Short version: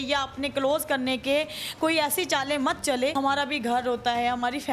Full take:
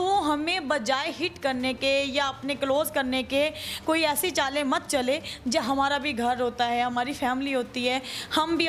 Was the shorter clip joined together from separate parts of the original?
yes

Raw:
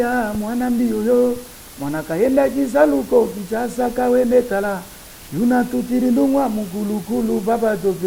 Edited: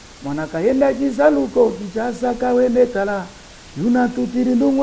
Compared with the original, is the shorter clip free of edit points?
yes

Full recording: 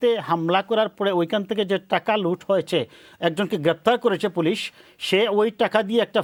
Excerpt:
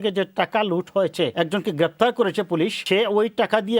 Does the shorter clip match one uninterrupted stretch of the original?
no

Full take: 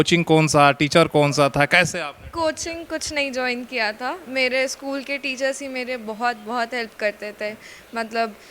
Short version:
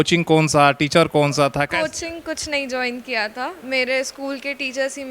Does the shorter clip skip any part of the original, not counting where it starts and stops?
yes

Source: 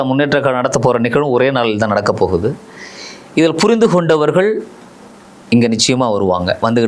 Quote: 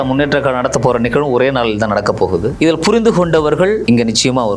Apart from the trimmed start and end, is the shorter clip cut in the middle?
yes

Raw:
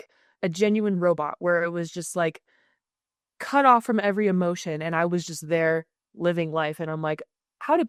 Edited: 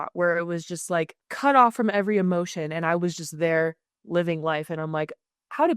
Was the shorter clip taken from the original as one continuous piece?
no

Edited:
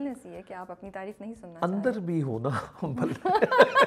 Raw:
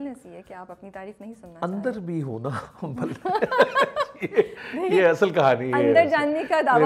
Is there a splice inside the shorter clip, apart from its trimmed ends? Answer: no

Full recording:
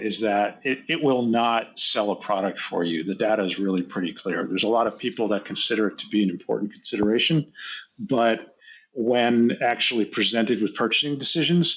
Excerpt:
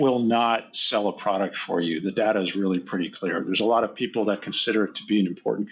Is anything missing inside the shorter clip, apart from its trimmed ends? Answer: no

